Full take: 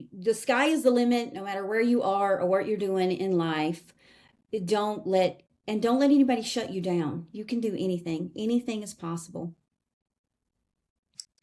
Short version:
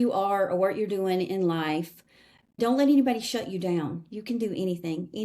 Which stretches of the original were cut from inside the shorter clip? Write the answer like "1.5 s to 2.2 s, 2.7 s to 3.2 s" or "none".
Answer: 4.5 s to 5.8 s